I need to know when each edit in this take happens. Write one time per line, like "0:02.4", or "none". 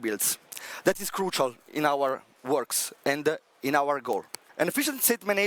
0:04.4

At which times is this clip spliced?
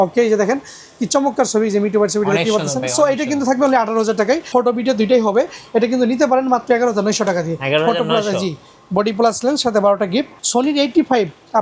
0:04.5
0:10.3

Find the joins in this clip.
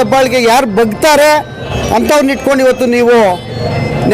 0:01.7

